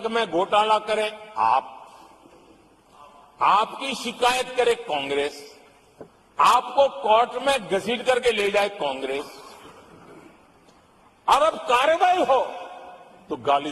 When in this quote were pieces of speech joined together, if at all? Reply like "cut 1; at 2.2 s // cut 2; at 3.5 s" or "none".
none